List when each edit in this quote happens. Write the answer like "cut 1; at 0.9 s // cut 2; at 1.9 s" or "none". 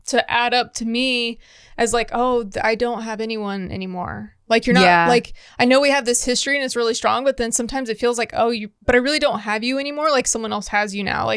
none